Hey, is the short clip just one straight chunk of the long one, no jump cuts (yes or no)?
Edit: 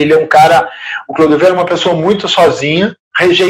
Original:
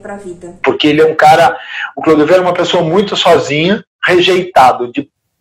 yes